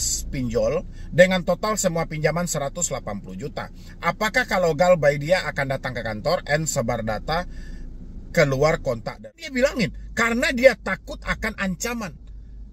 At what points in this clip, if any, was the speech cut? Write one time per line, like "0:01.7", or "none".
0:09.1